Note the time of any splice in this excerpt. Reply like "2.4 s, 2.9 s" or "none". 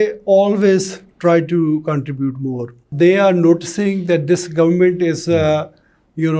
2.9 s